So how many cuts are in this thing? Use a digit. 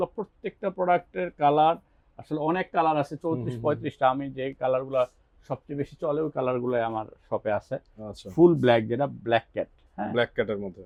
0